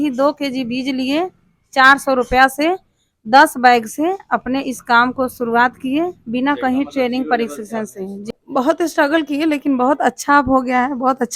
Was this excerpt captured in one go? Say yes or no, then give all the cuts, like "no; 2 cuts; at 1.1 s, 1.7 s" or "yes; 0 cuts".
no; 1 cut; at 8.3 s